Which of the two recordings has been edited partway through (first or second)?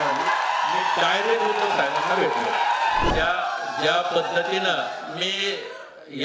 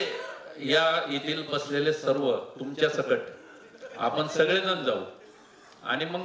first